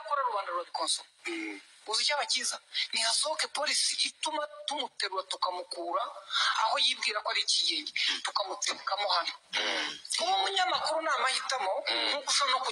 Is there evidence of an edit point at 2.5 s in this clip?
no; 0 cuts

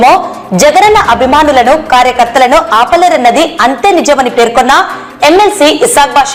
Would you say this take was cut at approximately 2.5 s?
no; 0 cuts

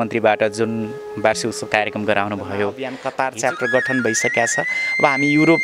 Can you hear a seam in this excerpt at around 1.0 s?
no; 1 cut; at 3.0 s

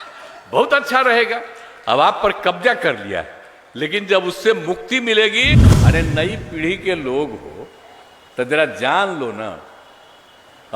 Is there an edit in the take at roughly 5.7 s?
yes; 1 cut; at 5.7 s

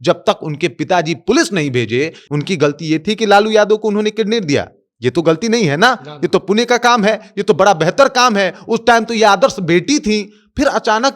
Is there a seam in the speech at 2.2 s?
yes; 1 cut; at 2.2 s

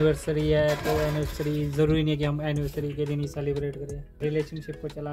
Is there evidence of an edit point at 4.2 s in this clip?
yes; 1 cut; at 4.2 s

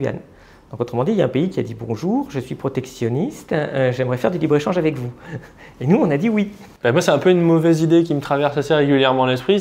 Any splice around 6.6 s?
yes; 1 cut; at 6.6 s

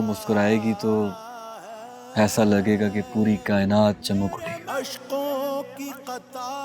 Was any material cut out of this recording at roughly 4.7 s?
yes; 1 cut; at 4.7 s

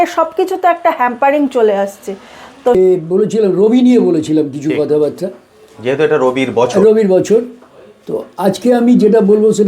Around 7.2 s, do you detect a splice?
no; 1 cut; at 2.8 s

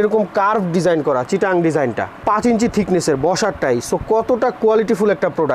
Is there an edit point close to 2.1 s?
no; 0 cuts

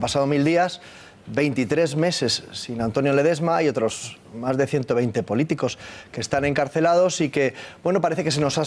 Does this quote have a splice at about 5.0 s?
yes; 1 cut; at 5.0 s

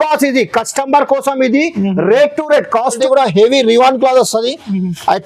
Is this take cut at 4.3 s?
no; 1 cut; at 2.9 s

